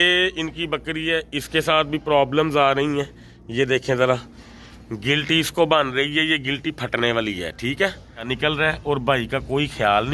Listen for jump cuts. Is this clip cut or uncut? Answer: cut